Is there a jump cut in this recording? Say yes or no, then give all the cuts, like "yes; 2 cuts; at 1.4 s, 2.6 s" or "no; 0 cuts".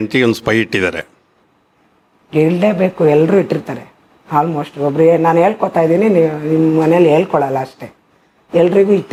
no; 0 cuts